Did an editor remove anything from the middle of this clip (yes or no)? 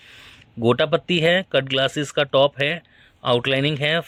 no